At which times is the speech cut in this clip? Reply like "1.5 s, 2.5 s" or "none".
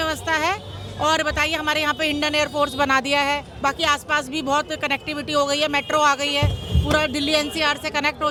none